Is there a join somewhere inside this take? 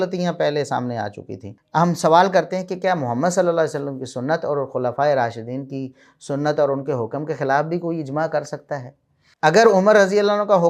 yes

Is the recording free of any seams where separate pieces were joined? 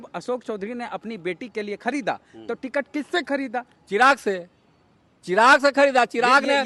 yes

